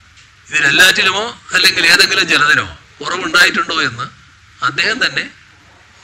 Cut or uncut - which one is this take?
cut